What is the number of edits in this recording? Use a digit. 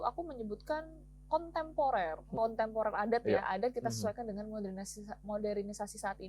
1